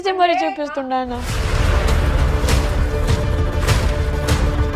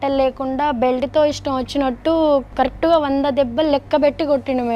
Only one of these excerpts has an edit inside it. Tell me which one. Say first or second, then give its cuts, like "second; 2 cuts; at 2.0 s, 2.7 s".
first; 1 cut; at 1.3 s